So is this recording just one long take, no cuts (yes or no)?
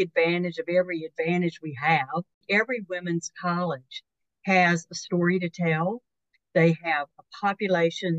no